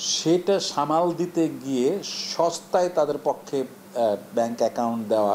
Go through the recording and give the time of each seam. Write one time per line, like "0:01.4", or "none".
none